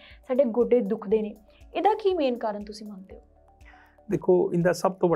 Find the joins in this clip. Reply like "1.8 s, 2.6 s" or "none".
none